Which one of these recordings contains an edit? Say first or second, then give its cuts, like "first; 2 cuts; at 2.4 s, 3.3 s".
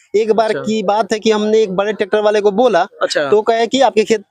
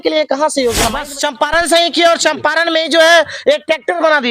second; 1 cut; at 1.0 s